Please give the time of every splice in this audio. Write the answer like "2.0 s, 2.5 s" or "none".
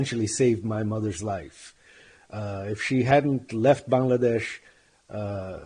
none

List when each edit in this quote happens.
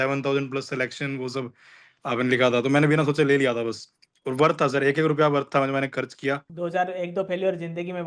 6.5 s

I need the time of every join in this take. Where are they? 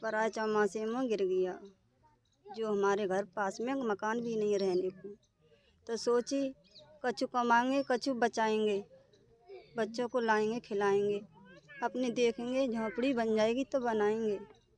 none

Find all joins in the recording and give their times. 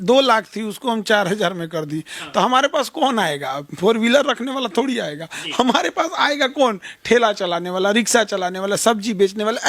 none

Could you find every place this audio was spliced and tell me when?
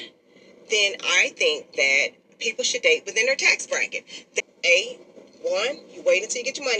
4.4 s

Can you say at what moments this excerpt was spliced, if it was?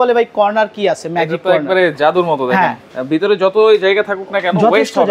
2.9 s

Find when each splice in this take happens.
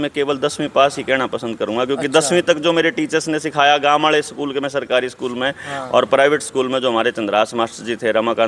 none

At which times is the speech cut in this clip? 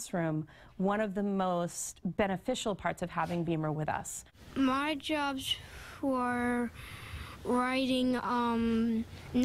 1.3 s

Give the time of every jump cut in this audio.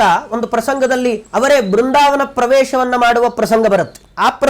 1.2 s

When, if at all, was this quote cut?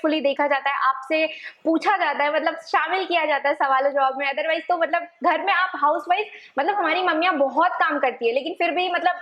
none

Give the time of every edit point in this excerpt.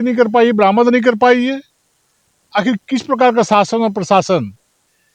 none

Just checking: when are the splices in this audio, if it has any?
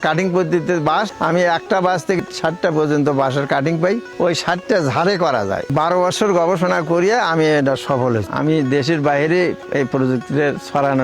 1.1 s, 2.2 s, 4.1 s, 5.7 s, 8.3 s

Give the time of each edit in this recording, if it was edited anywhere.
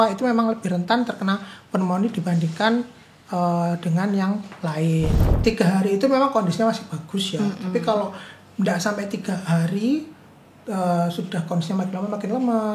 5.3 s

